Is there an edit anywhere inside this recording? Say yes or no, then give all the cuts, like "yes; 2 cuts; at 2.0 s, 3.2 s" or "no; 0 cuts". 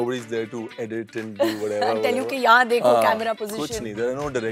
no; 0 cuts